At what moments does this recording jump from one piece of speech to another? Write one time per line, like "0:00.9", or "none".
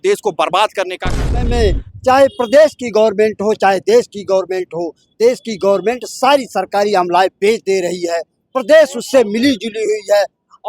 0:01.4